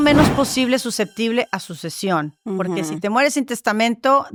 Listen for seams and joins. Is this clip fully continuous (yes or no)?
yes